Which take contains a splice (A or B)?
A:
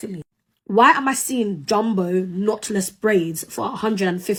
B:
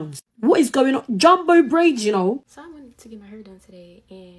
B